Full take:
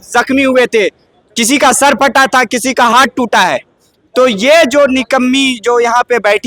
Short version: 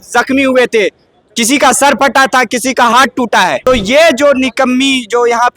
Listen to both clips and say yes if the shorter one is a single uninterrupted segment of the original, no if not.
no